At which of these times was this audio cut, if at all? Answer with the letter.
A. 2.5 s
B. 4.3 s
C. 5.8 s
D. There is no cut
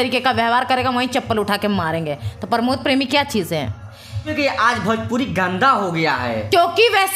B